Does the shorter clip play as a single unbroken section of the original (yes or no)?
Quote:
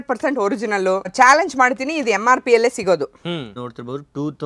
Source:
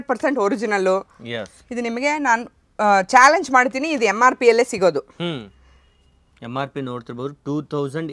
no